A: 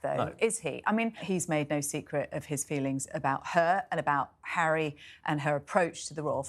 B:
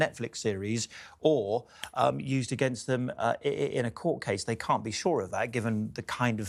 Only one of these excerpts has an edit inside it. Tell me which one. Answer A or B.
A